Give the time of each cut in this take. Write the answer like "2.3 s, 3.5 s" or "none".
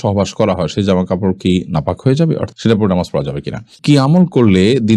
2.5 s, 3.7 s

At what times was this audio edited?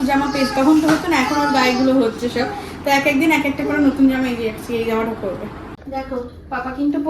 5.7 s

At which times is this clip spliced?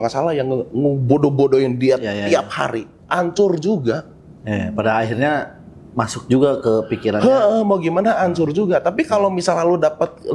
none

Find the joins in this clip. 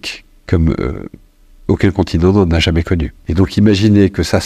3.0 s

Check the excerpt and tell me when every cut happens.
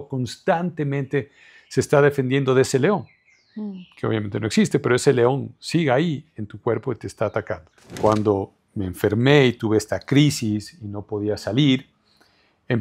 8.0 s

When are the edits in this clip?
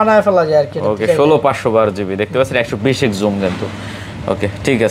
none

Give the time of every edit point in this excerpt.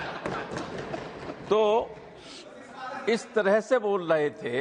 none

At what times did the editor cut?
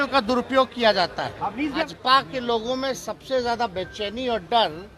1.8 s

